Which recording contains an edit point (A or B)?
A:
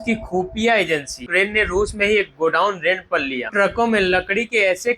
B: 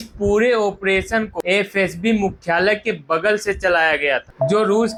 A